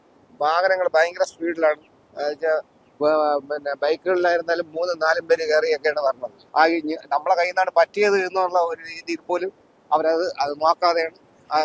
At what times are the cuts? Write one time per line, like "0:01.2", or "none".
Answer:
0:06.3